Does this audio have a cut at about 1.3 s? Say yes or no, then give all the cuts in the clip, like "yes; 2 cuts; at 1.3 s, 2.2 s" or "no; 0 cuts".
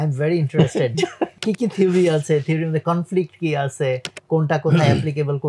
yes; 1 cut; at 1.3 s